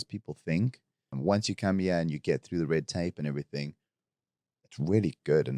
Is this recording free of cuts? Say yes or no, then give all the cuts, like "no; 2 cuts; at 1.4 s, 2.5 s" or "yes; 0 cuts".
no; 1 cut; at 1.2 s